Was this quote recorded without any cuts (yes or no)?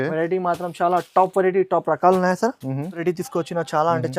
no